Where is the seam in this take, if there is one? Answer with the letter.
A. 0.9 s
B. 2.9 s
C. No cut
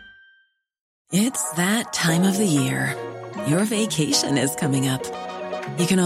A